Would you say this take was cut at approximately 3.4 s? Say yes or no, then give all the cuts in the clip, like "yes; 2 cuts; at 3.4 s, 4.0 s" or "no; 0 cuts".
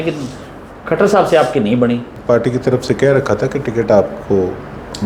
no; 1 cut; at 2.1 s